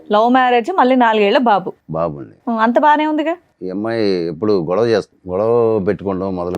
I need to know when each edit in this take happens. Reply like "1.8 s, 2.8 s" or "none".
3.5 s, 5.2 s